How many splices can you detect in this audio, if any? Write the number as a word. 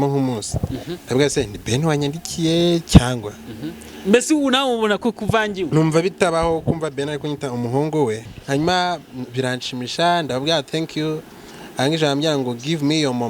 one